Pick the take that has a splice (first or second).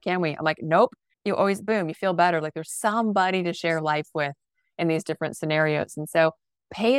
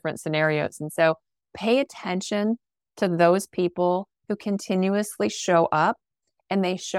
first